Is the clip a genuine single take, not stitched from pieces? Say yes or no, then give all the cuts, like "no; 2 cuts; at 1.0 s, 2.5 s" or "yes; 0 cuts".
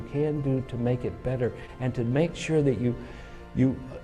no; 1 cut; at 1.7 s